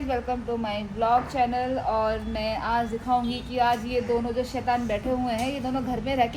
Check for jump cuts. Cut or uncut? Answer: uncut